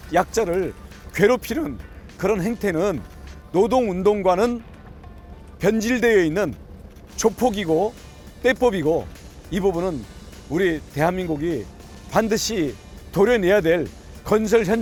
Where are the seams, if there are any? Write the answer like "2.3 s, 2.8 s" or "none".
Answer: none

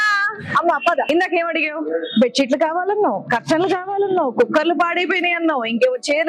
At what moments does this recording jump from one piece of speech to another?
1.1 s

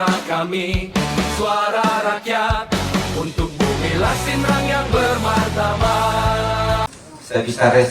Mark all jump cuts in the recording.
6.9 s

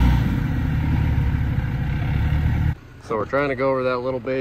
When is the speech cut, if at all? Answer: 2.8 s

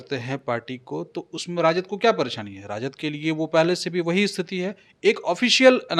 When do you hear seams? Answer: none

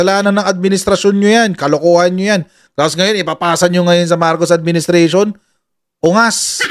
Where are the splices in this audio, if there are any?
none

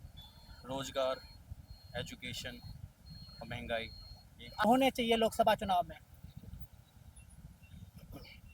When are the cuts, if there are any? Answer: 4.7 s

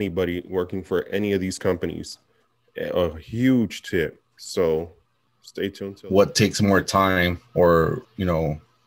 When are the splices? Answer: 5.9 s

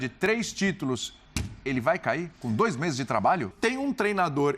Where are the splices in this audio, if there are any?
3.5 s

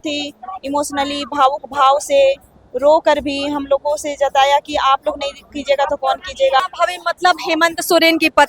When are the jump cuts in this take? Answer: 6.6 s

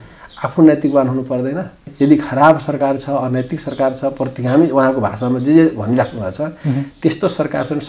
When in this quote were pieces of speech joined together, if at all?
1.8 s

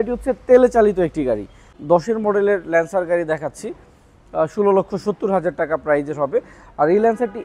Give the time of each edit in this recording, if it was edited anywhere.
1.7 s

